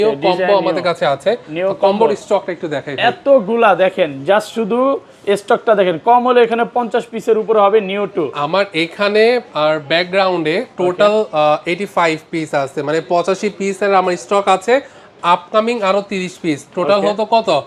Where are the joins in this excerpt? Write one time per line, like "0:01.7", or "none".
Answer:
none